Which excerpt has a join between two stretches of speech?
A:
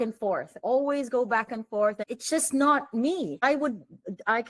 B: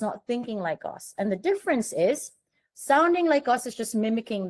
A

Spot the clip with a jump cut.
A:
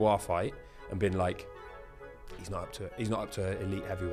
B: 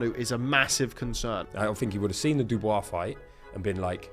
B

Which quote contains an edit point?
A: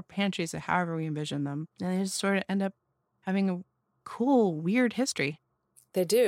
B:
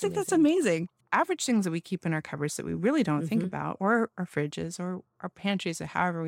B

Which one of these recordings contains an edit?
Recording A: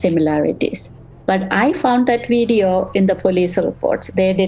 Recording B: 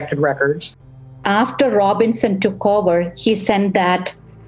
B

